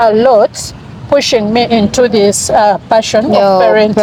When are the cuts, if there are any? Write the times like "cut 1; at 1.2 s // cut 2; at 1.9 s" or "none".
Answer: none